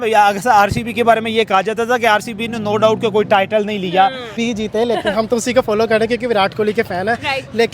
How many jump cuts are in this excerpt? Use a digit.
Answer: 1